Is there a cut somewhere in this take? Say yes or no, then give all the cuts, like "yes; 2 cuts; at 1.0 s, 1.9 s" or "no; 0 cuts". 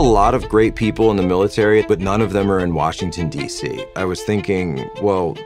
yes; 2 cuts; at 1.8 s, 3.9 s